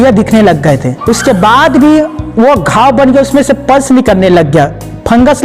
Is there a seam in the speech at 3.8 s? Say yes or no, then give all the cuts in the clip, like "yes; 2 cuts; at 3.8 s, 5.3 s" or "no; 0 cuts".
no; 1 cut; at 0.9 s